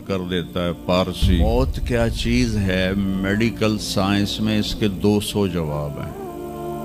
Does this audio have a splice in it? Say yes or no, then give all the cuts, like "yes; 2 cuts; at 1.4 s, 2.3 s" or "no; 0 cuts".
yes; 1 cut; at 1.4 s